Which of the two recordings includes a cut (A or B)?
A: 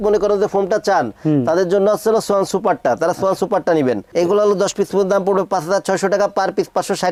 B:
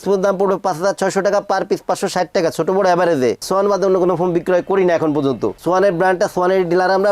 B